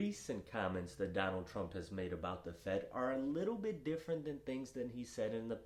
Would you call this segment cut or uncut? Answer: uncut